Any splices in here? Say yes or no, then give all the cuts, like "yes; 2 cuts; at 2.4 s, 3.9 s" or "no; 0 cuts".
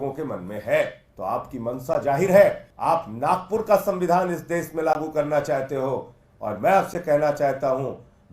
yes; 2 cuts; at 1.0 s, 2.7 s